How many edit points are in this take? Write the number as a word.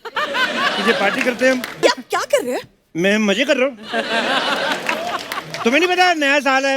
one